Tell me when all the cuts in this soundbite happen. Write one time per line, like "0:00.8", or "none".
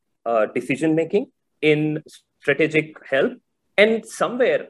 0:01.7
0:03.0

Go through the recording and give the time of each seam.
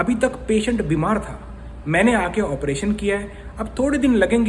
none

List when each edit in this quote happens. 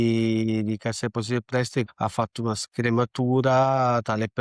0:01.9

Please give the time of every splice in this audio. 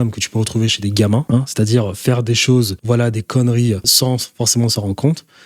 0:01.2
0:02.8
0:03.9

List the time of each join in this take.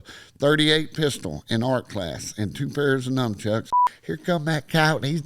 0:03.7

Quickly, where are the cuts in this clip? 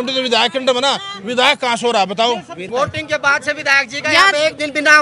0:02.6

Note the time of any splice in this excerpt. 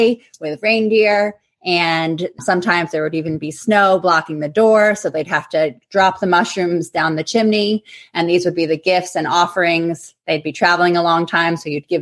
none

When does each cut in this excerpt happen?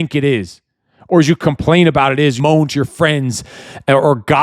0:02.4

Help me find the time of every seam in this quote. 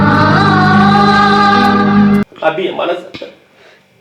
0:02.3

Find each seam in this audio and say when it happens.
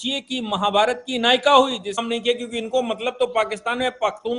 0:02.0

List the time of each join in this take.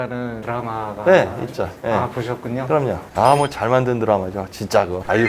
none

